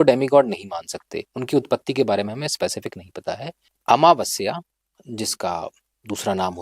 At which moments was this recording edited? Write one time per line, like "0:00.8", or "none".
0:03.7